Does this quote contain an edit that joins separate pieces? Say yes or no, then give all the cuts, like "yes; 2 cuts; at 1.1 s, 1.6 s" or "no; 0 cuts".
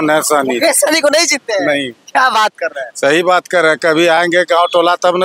no; 0 cuts